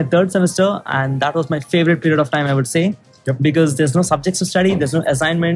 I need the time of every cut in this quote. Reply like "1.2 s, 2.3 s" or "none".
none